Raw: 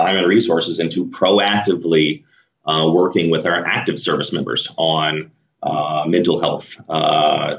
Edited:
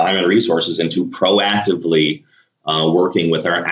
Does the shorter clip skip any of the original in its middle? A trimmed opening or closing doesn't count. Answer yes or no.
no